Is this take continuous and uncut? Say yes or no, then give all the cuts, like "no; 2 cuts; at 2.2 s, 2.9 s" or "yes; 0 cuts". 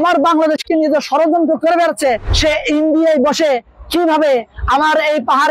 no; 1 cut; at 2.3 s